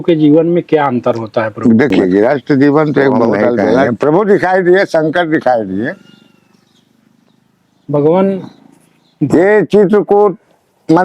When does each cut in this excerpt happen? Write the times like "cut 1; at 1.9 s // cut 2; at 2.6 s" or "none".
cut 1; at 3.8 s